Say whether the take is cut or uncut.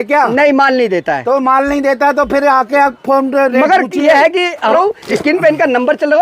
cut